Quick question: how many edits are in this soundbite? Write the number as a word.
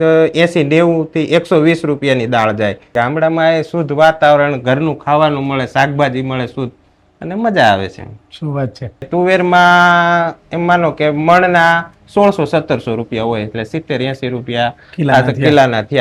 two